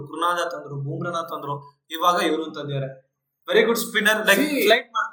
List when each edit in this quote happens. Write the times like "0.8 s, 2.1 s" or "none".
none